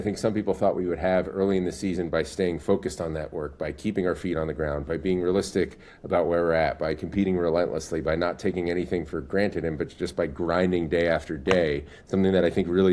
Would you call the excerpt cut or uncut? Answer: uncut